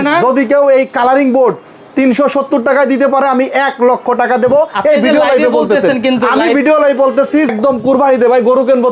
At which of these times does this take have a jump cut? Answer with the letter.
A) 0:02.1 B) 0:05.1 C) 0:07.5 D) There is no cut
C